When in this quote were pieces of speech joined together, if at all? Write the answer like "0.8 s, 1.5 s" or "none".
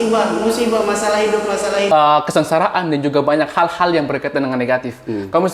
1.9 s